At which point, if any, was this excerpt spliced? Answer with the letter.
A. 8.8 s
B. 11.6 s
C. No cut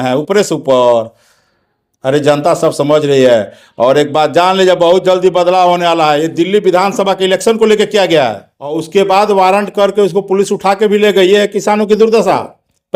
A